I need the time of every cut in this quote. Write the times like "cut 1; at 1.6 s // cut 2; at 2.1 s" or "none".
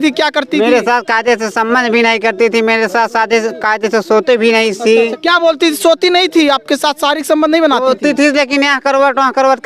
none